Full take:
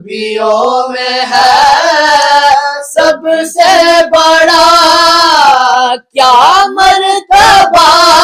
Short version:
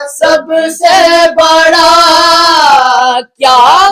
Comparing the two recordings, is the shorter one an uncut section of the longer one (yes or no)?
yes